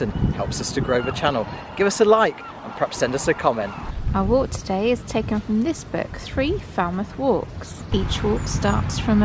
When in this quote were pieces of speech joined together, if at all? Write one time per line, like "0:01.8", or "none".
0:03.9